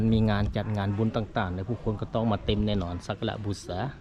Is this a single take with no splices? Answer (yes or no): yes